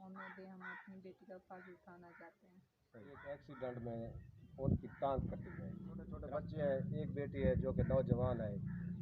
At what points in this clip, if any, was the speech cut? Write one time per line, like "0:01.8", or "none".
0:03.2
0:06.2